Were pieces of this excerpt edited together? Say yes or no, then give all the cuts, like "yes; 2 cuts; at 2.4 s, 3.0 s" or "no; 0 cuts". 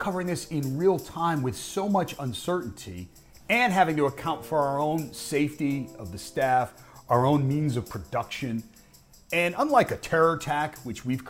no; 0 cuts